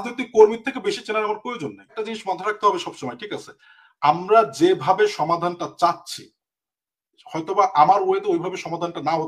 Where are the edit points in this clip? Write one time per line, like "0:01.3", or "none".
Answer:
0:01.9